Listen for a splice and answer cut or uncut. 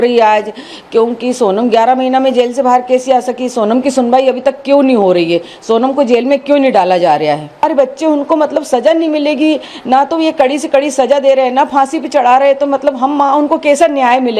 cut